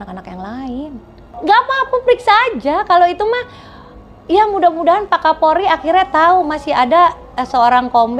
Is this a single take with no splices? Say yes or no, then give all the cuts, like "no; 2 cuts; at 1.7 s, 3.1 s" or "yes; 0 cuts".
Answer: no; 1 cut; at 1.3 s